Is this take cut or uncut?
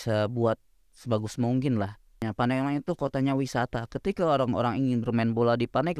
cut